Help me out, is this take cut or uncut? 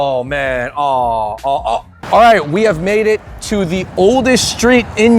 cut